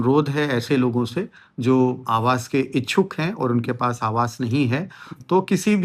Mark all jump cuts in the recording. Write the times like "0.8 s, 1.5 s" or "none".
none